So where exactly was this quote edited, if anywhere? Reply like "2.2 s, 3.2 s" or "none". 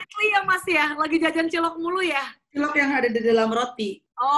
none